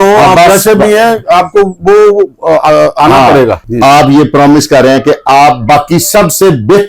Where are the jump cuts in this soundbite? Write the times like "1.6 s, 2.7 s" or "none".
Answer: 3.6 s